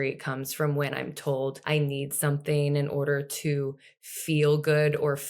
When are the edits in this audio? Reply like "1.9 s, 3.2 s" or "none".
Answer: 1.6 s